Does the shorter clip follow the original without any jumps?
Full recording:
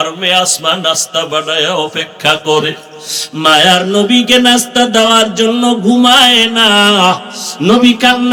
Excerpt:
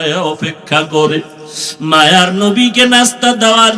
yes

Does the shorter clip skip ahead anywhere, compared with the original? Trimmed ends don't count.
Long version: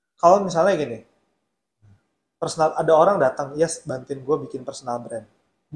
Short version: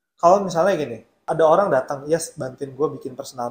yes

